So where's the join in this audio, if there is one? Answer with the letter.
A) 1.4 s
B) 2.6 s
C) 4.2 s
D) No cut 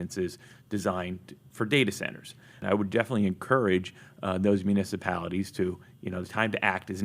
B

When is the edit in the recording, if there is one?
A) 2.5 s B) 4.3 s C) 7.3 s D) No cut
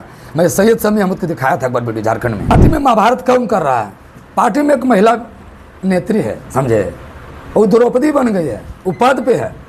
A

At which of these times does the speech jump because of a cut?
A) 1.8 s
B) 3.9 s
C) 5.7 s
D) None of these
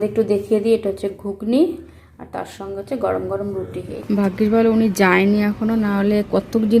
B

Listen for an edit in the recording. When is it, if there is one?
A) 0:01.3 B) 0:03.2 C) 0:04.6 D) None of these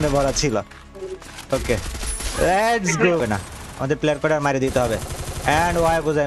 B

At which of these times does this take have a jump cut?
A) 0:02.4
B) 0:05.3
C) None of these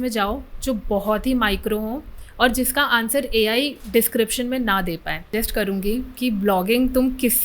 B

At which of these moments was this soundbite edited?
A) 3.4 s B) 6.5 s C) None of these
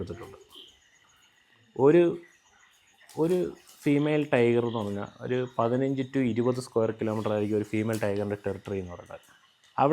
C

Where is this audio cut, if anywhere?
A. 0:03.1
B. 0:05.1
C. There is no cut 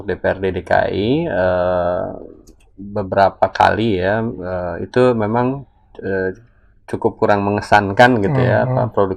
C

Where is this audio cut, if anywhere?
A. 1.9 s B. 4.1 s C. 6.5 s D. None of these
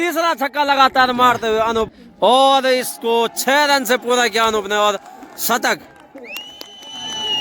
A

